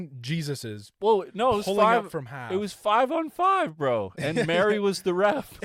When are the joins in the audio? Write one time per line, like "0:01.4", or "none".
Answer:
none